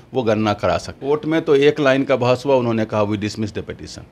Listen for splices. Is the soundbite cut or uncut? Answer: cut